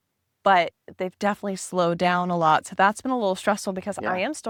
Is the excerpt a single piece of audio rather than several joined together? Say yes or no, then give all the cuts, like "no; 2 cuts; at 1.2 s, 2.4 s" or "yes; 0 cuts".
yes; 0 cuts